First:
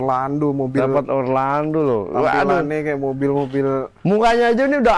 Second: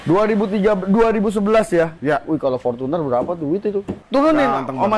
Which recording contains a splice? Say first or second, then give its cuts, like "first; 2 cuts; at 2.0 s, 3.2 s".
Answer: second; 1 cut; at 4.0 s